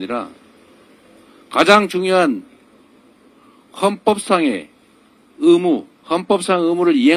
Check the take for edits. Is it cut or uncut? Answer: cut